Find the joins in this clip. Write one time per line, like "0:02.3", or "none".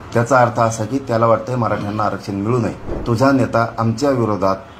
0:02.9